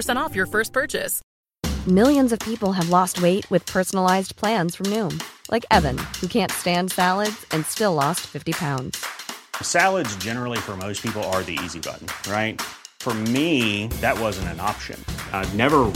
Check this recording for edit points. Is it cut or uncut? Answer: cut